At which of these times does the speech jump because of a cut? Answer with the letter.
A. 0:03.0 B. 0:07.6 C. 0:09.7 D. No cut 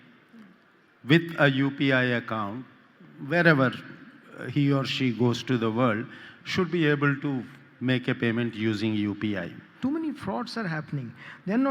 C